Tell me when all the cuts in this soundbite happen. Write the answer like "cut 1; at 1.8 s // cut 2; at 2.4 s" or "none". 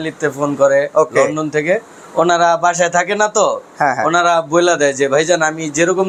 none